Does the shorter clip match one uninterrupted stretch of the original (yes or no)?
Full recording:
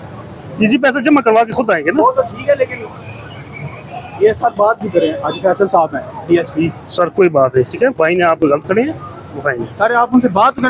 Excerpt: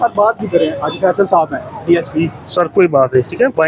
yes